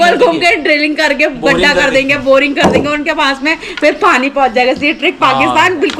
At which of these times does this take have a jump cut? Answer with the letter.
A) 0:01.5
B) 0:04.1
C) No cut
C